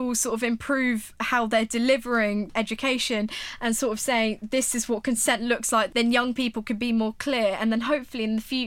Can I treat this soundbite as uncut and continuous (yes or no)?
no